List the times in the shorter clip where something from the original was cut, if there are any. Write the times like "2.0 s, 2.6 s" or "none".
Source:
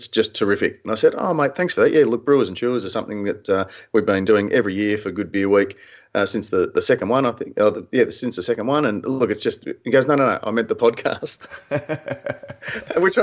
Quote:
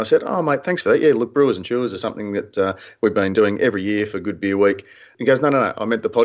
5.1 s